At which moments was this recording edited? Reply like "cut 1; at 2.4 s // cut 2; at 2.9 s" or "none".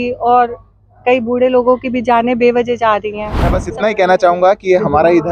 cut 1; at 3.6 s